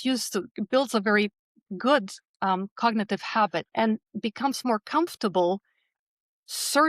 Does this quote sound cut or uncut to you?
cut